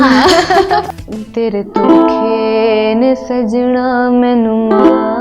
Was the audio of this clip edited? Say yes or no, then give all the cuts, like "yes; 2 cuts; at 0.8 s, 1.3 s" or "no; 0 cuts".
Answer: yes; 1 cut; at 0.9 s